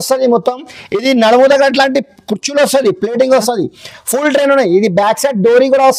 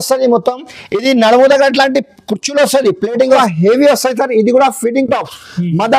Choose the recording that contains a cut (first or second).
second